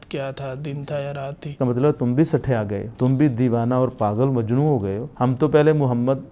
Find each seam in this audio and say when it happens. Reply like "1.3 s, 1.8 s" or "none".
1.5 s, 2.8 s, 5.0 s